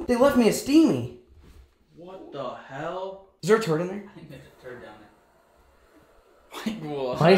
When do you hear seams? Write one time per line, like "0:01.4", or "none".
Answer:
none